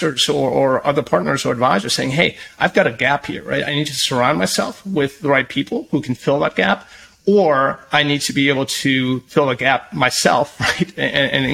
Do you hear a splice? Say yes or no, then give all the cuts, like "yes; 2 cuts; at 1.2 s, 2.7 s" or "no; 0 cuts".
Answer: no; 0 cuts